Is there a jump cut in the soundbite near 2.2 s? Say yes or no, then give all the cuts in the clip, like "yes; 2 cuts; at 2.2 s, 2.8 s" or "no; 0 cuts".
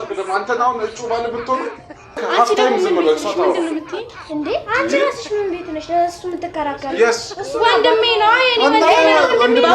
yes; 1 cut; at 2.2 s